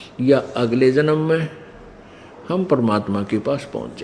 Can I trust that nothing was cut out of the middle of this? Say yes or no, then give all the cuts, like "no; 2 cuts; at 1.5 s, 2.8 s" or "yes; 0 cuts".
yes; 0 cuts